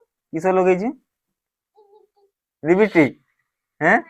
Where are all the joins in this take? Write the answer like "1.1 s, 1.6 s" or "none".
2.6 s